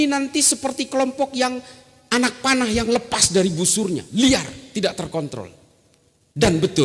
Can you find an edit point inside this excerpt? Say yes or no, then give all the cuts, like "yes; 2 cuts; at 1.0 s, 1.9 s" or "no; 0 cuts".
no; 0 cuts